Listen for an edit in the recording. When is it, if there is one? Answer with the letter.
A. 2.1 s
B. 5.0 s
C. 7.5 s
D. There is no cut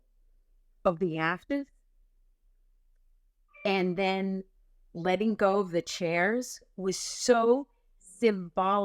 D